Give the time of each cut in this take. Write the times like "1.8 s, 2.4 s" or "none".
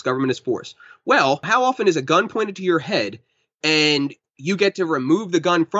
1.5 s